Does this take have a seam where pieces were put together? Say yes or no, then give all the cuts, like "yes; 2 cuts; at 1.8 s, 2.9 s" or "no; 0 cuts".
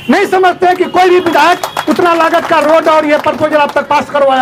no; 0 cuts